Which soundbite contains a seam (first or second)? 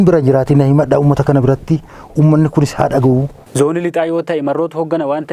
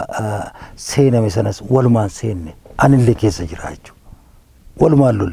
first